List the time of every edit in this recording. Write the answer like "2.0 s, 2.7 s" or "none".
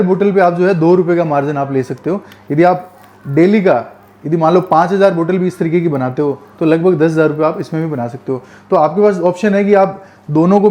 none